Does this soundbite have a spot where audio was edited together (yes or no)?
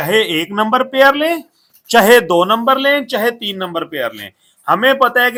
no